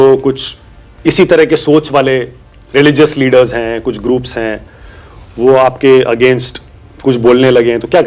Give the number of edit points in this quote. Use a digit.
0